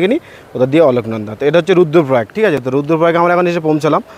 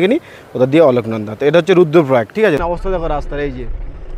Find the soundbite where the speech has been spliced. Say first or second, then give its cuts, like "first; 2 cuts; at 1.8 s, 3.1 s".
second; 1 cut; at 2.6 s